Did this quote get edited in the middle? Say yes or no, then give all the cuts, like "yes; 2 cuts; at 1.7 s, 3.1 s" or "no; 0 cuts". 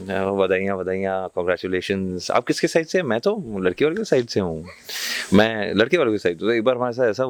no; 0 cuts